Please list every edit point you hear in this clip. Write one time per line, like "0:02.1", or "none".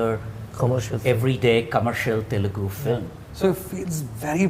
0:03.2